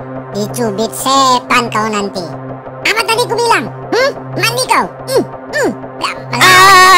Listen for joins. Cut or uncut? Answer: cut